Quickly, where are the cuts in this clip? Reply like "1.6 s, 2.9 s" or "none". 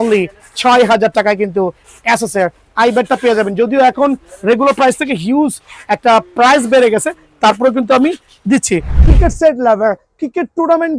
8.9 s